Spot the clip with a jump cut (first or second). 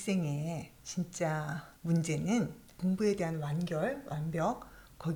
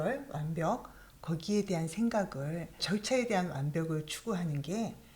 second